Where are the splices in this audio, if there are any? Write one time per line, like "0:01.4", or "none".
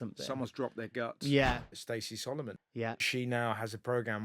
0:01.7
0:02.6